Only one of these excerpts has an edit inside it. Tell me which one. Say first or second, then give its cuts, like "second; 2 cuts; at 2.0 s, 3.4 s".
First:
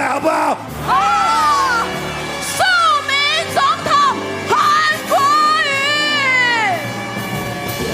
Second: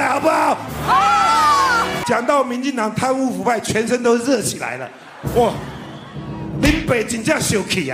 second; 1 cut; at 2.0 s